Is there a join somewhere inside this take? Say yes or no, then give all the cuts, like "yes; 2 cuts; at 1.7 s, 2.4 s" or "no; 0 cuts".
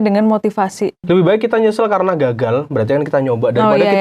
yes; 1 cut; at 1.0 s